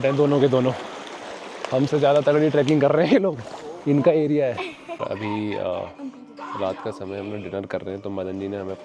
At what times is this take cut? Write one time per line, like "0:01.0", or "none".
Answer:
0:05.0

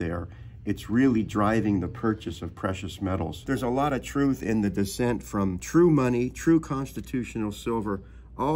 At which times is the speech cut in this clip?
0:03.3
0:05.6

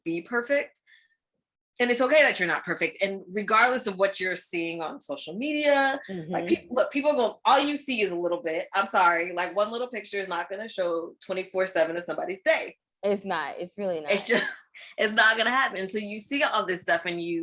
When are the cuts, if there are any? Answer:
none

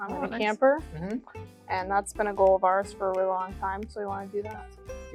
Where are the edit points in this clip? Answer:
none

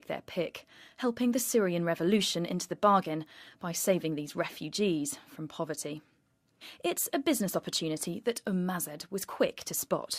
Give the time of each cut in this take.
0:09.3

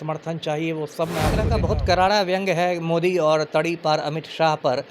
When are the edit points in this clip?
0:01.5

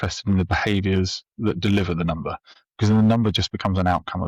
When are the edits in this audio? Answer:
none

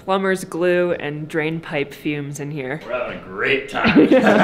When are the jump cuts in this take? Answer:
0:02.8

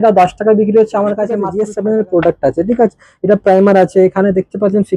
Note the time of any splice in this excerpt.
0:01.4

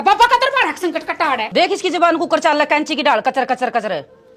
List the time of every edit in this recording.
0:01.5

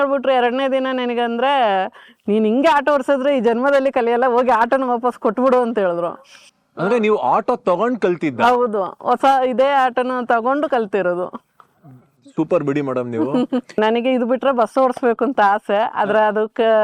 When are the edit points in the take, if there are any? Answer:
0:13.7

